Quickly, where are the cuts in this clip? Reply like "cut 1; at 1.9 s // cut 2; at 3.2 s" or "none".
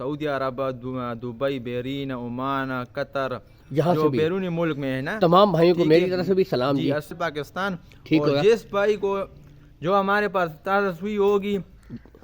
cut 1; at 7.1 s